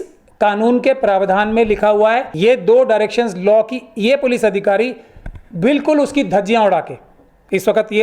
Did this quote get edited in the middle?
yes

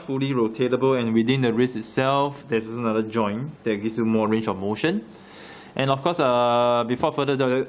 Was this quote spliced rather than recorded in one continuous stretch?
yes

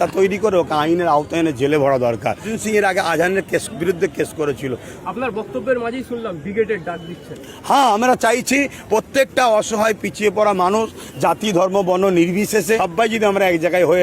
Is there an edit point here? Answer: yes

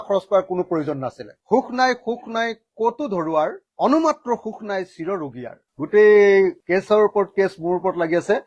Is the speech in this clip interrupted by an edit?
yes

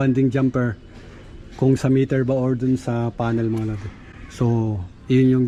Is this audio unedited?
yes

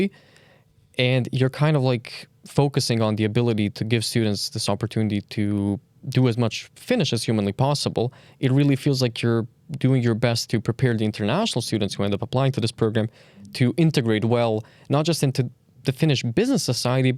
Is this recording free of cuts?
yes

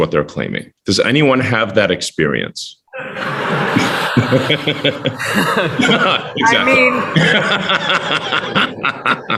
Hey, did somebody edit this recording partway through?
no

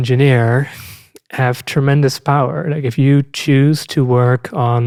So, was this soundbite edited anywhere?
no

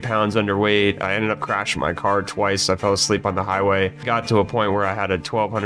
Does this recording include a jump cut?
yes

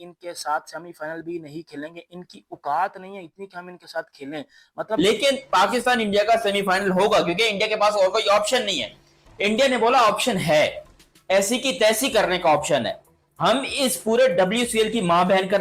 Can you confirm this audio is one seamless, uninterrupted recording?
no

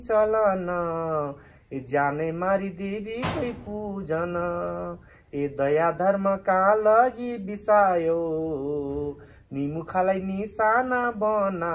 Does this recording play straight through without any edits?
yes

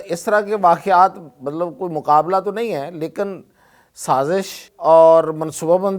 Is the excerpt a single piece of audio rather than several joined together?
no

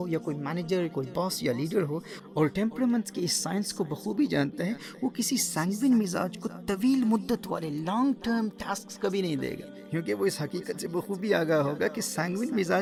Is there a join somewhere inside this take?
no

